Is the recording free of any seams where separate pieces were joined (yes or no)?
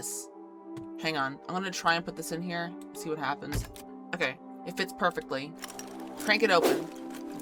yes